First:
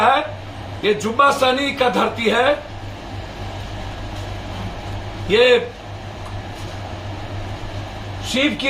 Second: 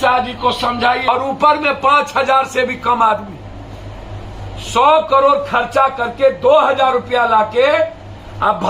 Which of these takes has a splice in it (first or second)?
second